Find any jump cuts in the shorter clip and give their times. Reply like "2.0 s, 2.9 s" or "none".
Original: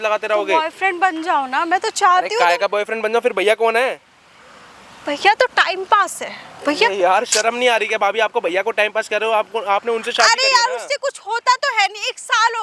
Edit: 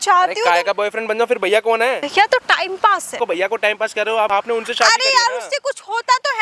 2.1 s, 3.2 s, 4.3 s